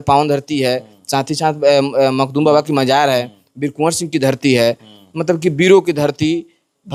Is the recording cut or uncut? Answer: uncut